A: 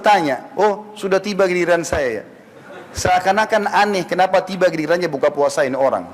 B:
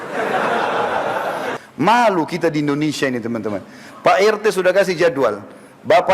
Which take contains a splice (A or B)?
B